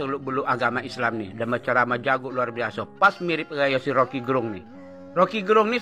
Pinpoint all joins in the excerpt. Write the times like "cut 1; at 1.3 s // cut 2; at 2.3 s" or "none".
none